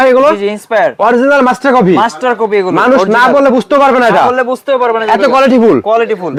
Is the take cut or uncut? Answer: uncut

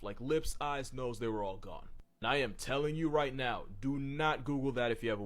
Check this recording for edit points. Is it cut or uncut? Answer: uncut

